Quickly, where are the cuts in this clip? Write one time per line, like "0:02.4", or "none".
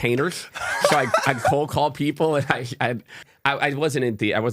0:03.2

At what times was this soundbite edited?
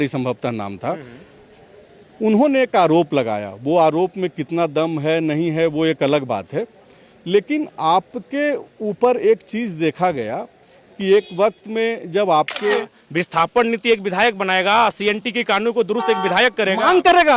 0:12.7

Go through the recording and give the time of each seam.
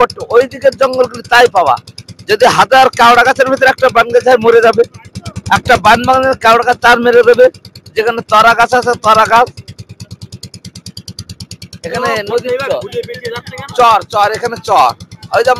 none

